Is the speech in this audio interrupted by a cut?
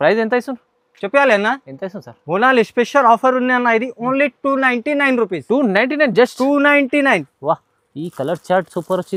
no; 0 cuts

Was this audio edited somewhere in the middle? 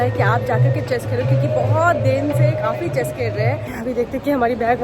yes; 1 cut; at 3.7 s

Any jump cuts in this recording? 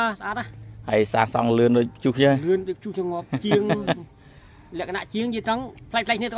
no; 0 cuts

